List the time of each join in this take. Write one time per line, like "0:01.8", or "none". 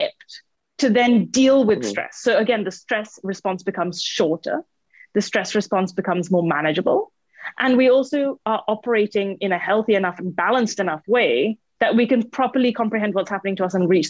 none